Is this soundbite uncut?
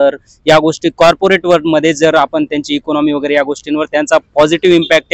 yes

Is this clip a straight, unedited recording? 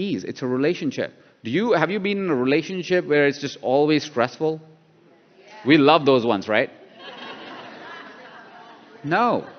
yes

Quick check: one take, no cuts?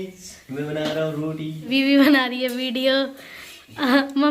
no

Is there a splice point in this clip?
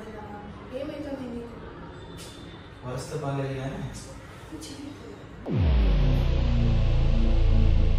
no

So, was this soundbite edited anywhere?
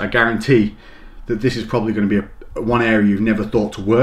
no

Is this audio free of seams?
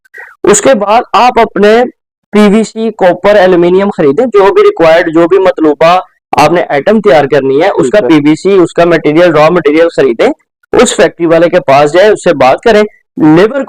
yes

